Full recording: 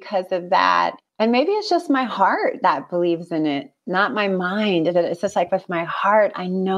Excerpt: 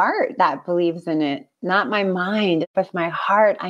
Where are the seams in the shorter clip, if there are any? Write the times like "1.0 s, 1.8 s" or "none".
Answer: 2.7 s

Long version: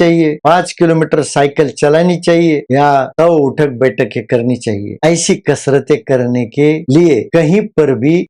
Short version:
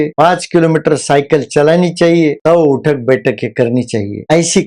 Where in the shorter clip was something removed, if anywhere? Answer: 2.4 s

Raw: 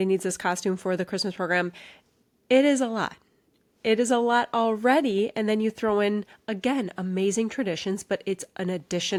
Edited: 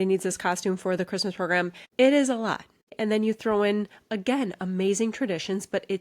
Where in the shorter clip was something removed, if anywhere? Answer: 1.8 s, 3.0 s

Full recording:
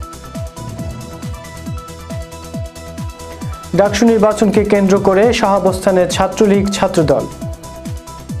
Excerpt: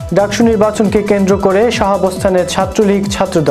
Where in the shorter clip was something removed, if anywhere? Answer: none

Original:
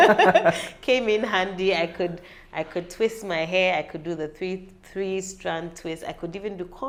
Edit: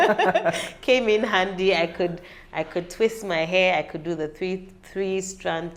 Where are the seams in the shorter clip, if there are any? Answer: none

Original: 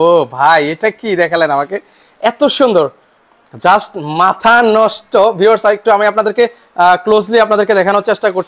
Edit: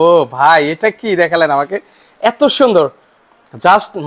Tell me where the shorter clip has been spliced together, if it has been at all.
none

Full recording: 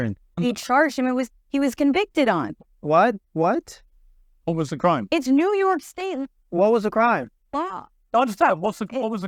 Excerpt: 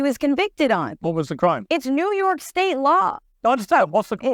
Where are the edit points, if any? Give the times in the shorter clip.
0.9 s, 2.8 s

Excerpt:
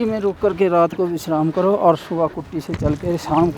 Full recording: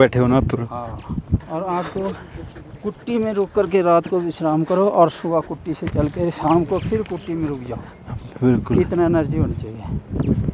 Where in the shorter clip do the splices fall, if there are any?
none

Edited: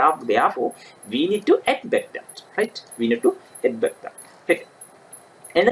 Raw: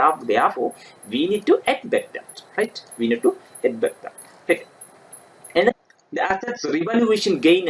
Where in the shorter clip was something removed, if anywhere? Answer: none

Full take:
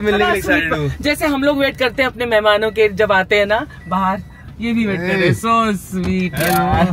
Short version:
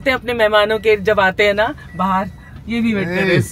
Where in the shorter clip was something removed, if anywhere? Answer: none

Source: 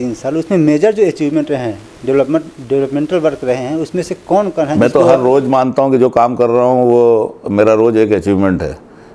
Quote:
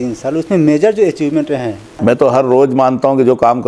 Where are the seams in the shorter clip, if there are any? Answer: 2.0 s

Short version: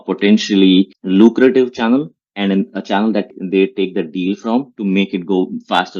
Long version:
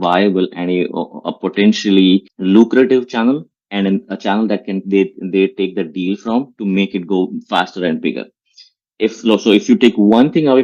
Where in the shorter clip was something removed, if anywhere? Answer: 3.3 s

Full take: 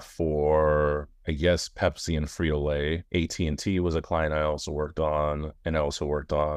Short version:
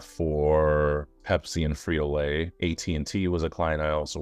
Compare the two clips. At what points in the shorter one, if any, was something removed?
1.2 s

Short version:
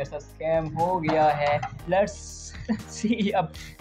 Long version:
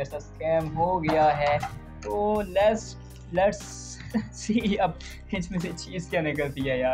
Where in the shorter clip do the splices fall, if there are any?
1.7 s

